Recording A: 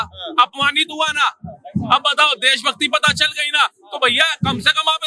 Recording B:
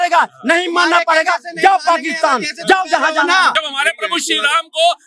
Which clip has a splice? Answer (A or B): B